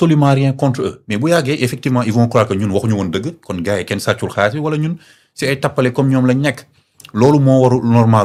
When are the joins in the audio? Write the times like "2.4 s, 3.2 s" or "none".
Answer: none